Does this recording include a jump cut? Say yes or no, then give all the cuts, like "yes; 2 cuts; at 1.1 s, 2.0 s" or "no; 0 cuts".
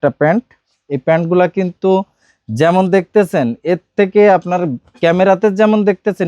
no; 0 cuts